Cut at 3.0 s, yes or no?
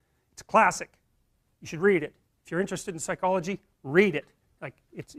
no